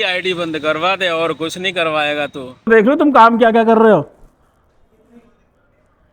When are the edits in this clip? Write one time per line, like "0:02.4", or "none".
0:02.7